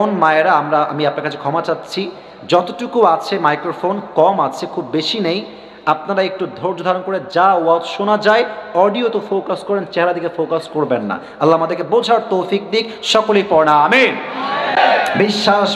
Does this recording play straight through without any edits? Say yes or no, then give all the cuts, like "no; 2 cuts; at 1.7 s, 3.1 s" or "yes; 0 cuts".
no; 1 cut; at 14.8 s